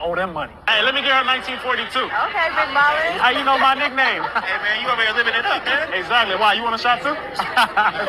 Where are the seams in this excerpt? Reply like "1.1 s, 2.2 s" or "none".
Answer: 1.5 s